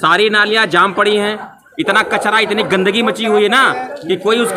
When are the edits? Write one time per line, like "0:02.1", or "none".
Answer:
none